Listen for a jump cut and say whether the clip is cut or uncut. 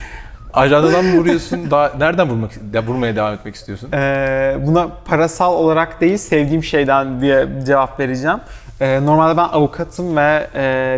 uncut